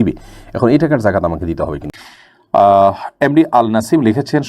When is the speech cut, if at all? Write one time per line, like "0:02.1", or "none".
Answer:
0:01.8